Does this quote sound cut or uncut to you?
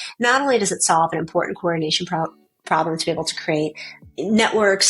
cut